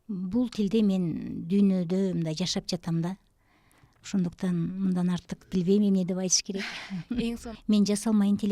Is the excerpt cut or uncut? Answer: cut